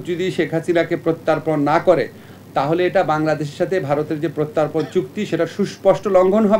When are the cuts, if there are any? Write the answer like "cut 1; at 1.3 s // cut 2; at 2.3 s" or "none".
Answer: none